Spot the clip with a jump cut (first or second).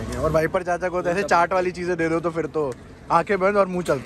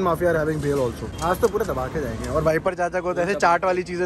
second